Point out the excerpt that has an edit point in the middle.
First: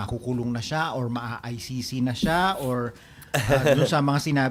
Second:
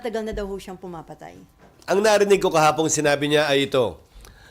second; 1 cut; at 1.7 s

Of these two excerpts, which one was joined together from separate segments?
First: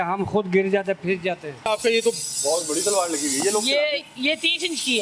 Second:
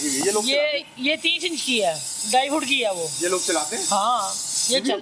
first; 1 cut; at 1.7 s

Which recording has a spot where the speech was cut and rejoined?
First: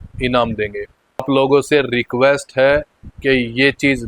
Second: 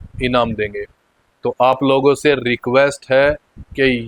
first; 1 cut; at 1.2 s

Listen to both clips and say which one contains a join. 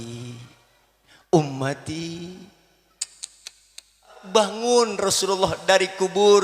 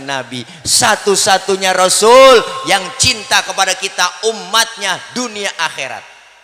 first; 1 cut; at 4.2 s

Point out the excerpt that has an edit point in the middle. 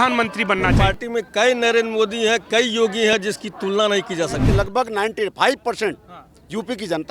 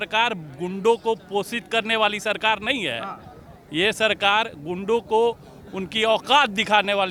first; 2 cuts; at 0.7 s, 4.5 s

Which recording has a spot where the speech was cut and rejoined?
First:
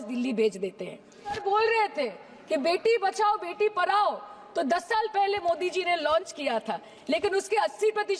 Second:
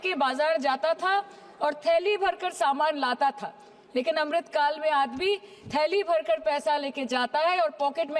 first; 1 cut; at 1.4 s

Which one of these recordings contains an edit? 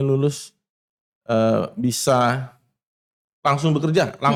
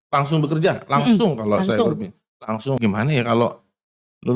second; 1 cut; at 2.8 s

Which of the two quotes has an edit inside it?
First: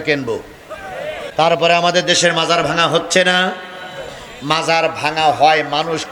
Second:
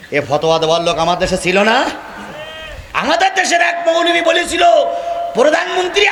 first; 1 cut; at 1.2 s

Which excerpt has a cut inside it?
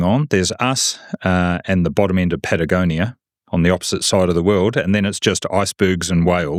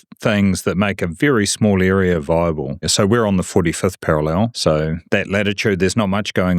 second; 2 cuts; at 2.9 s, 4.6 s

